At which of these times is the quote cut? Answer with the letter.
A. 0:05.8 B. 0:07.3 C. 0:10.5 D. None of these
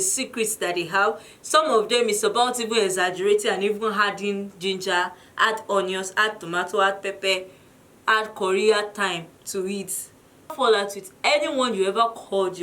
C